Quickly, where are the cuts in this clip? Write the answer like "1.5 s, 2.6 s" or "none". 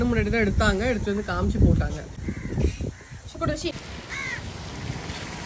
none